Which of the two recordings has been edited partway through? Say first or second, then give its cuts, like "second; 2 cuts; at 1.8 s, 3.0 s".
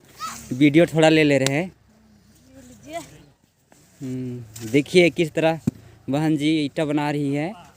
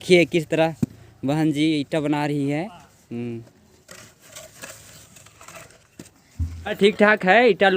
second; 1 cut; at 6.8 s